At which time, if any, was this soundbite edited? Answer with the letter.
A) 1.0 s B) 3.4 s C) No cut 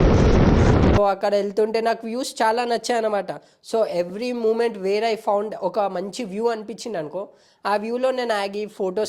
A